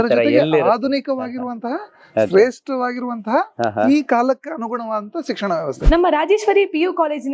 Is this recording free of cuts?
no; 1 cut; at 5.8 s

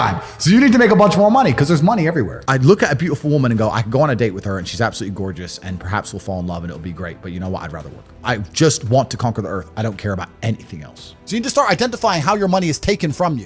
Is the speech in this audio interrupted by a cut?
yes; 3 cuts; at 2.4 s, 8.2 s, 11.1 s

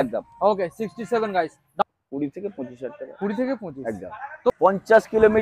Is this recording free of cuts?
no; 2 cuts; at 1.8 s, 4.5 s

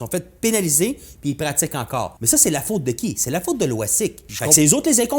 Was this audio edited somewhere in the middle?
yes; 2 cuts; at 2.2 s, 4.3 s

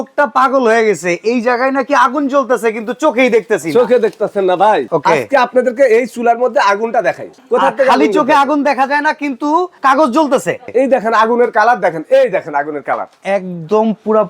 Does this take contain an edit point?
yes; 4 cuts; at 4.9 s, 7.3 s, 9.7 s, 10.7 s

